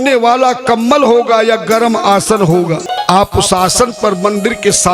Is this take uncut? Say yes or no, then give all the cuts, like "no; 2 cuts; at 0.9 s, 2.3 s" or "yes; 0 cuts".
no; 1 cut; at 2.9 s